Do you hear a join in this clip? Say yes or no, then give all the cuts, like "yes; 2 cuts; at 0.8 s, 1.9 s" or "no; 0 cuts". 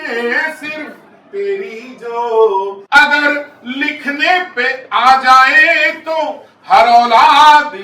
yes; 1 cut; at 2.8 s